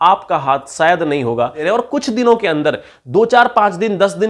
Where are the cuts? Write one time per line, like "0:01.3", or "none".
0:01.7